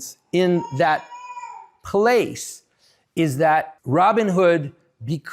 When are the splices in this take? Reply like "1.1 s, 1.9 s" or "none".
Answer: 3.8 s